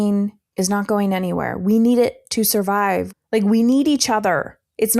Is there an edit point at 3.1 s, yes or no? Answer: yes